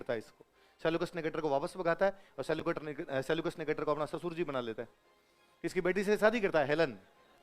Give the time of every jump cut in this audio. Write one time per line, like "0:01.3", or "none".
none